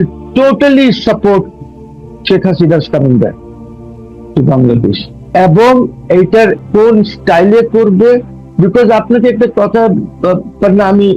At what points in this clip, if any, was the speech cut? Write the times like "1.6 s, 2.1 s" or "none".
5.3 s, 6.6 s